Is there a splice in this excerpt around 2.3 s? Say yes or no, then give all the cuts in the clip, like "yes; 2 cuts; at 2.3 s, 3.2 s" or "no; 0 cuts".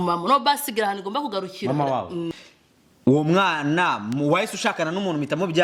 yes; 1 cut; at 2.3 s